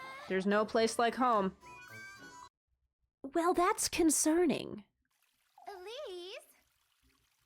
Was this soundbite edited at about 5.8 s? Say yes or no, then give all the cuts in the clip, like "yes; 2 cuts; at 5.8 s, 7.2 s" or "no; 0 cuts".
no; 1 cut; at 2.5 s